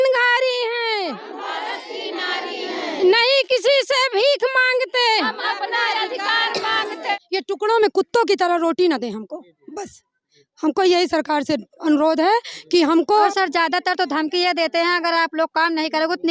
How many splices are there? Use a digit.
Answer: 2